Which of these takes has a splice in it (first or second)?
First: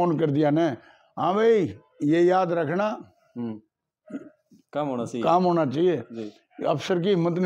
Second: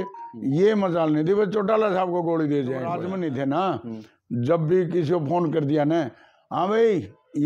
second